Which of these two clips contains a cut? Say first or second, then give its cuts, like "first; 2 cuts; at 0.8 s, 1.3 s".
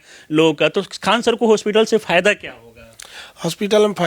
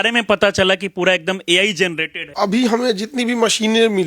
second; 1 cut; at 2.2 s